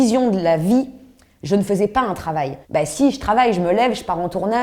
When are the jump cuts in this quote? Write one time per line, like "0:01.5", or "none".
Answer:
0:02.6